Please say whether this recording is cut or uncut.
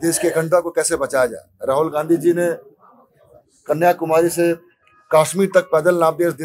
uncut